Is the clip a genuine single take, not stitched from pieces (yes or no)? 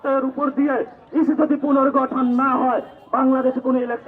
yes